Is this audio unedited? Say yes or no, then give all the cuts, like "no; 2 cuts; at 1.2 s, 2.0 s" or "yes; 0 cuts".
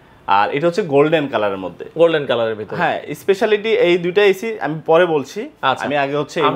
yes; 0 cuts